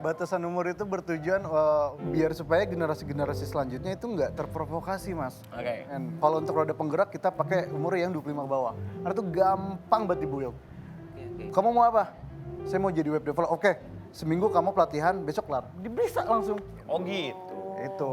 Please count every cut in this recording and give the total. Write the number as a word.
three